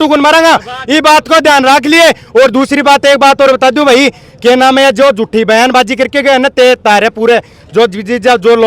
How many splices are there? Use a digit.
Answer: 0